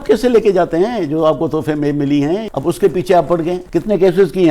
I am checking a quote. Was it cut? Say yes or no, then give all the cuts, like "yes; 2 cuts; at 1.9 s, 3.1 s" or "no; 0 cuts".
yes; 2 cuts; at 2.4 s, 3.6 s